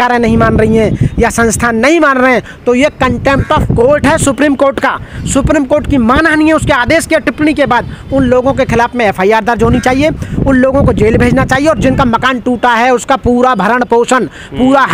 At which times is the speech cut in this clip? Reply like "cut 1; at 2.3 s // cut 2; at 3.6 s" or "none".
none